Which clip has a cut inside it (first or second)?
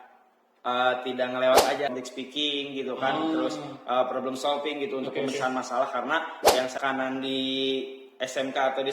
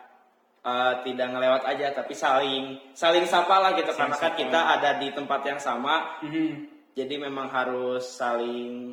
first